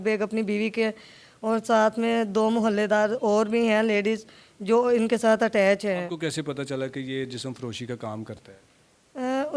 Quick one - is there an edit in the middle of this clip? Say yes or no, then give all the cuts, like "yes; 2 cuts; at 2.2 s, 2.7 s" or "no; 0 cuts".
yes; 1 cut; at 6.1 s